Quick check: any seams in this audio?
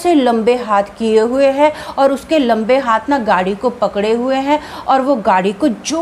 no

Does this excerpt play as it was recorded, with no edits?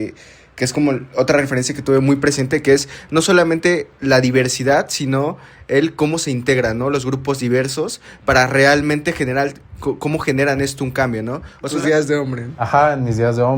no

